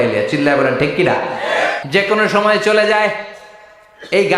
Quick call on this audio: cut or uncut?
cut